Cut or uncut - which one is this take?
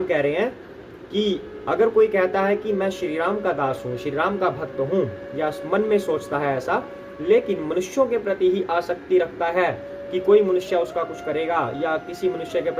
uncut